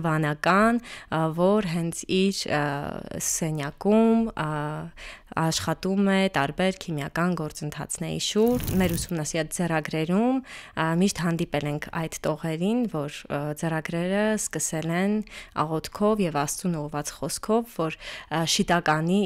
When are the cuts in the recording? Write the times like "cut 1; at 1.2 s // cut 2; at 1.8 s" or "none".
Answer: cut 1; at 8.7 s